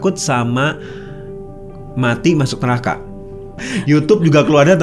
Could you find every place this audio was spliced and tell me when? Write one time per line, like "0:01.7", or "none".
0:03.6